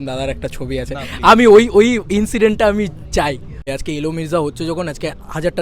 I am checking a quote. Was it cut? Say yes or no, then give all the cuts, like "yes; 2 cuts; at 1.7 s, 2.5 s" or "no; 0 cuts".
yes; 1 cut; at 3.7 s